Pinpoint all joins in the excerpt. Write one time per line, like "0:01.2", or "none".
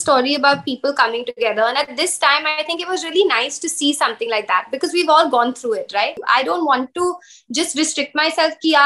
0:06.2